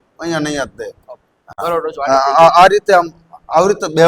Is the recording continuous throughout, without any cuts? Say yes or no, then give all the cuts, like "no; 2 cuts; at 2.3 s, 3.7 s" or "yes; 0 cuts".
no; 1 cut; at 1.6 s